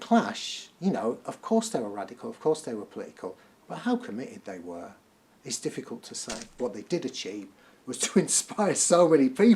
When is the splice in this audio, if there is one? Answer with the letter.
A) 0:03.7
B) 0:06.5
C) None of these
B